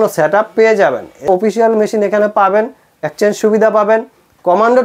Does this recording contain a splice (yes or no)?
yes